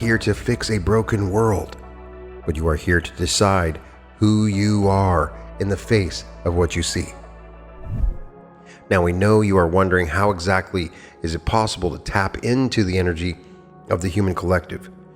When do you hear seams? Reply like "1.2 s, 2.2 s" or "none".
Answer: 8.0 s